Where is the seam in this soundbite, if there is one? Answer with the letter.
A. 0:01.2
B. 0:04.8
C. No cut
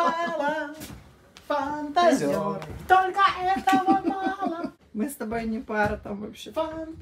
B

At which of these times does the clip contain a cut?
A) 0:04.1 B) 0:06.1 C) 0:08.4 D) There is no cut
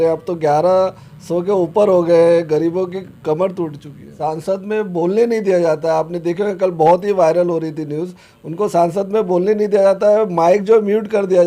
A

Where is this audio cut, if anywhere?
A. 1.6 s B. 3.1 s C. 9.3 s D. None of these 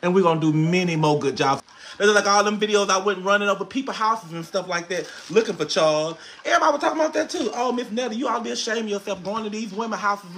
A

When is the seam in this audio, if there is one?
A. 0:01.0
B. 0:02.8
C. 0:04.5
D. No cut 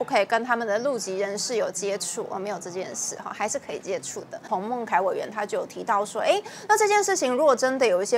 C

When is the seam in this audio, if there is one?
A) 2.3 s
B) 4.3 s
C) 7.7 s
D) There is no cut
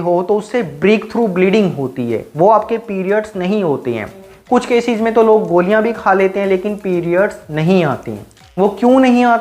B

